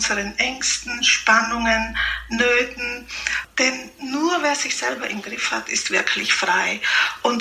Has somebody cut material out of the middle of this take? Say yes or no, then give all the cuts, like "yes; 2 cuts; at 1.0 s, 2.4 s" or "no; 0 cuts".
yes; 1 cut; at 3.4 s